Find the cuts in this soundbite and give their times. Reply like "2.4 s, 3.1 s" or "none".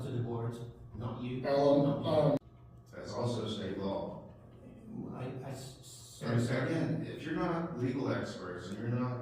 2.4 s